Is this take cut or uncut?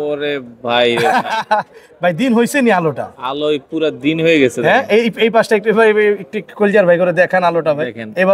uncut